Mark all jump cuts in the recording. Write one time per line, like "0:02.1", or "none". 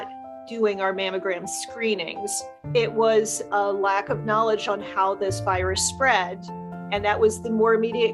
0:02.5